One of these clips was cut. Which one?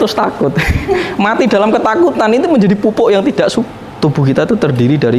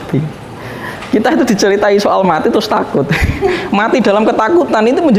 first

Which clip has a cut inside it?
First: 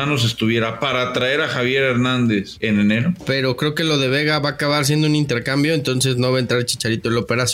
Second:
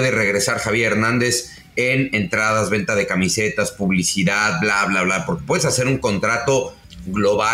first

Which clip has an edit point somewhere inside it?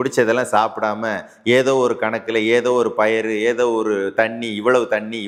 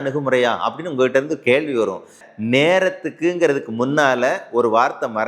second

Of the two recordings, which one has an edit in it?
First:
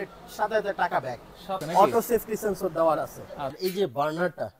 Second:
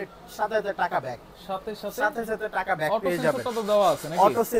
first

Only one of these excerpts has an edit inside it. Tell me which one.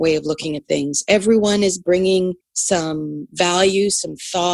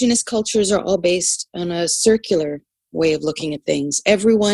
first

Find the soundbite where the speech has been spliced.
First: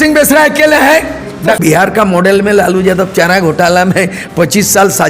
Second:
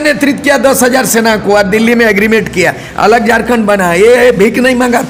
first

